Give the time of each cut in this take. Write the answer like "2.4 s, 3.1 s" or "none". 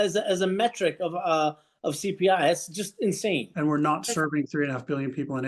3.5 s